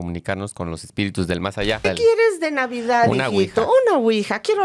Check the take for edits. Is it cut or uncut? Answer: cut